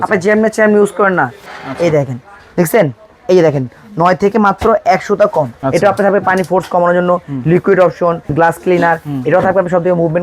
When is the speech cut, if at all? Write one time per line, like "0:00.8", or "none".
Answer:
0:01.4
0:05.5
0:08.3